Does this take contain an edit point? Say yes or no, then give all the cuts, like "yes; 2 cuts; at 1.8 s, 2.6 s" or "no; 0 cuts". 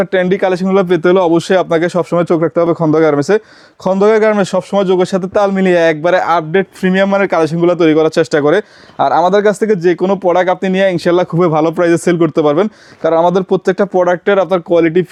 no; 0 cuts